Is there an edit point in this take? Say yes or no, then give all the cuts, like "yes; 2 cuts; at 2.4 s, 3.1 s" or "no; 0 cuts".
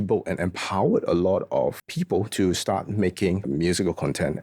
yes; 2 cuts; at 1.9 s, 3.4 s